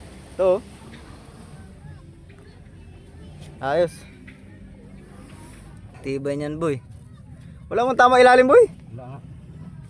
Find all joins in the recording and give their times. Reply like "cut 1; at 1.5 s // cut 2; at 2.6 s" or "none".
cut 1; at 5.8 s